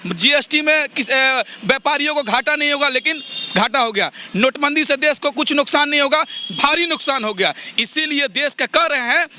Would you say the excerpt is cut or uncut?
uncut